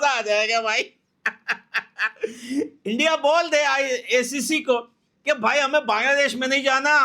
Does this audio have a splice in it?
no; 0 cuts

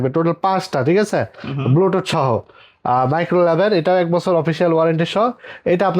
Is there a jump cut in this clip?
no; 0 cuts

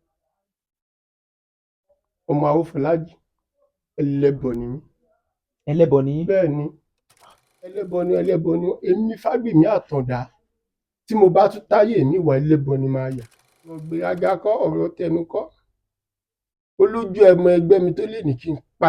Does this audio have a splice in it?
yes; 2 cuts; at 7.9 s, 13.9 s

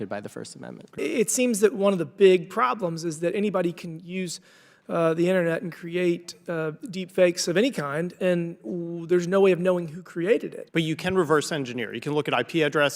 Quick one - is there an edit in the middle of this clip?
yes; 1 cut; at 10.6 s

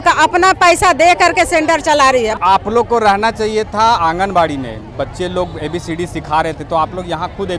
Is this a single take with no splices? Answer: yes; 0 cuts

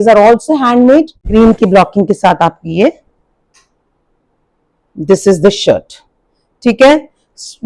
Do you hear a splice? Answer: yes; 1 cut; at 1.2 s

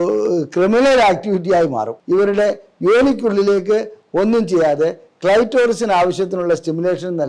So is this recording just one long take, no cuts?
no; 1 cut; at 1.9 s

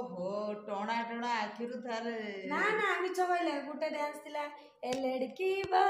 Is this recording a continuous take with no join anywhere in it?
yes; 0 cuts

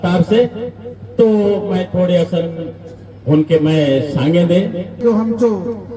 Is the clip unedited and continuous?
no; 1 cut; at 5.0 s

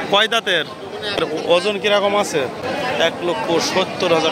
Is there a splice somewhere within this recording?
yes; 2 cuts; at 1.2 s, 2.6 s

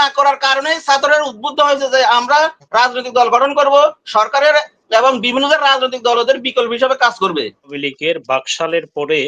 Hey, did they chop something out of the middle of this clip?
yes; 1 cut; at 7.8 s

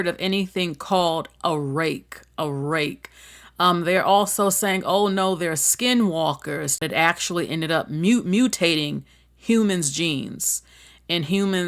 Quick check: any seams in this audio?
yes; 1 cut; at 6.8 s

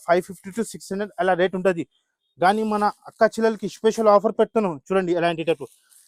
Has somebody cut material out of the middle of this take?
no; 0 cuts

